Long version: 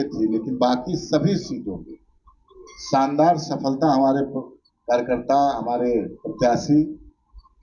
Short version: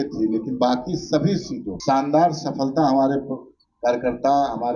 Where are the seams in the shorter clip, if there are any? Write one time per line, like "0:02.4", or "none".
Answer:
0:01.7